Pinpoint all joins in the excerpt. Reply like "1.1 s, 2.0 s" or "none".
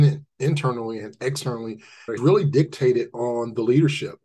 2.1 s